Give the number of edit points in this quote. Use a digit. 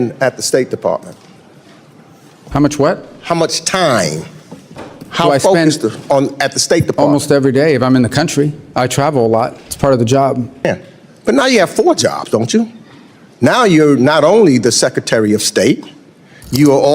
1